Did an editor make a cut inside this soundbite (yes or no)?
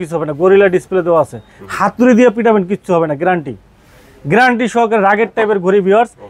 no